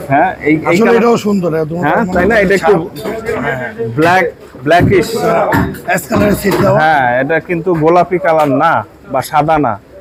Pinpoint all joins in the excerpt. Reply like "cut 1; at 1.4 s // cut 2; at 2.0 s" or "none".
none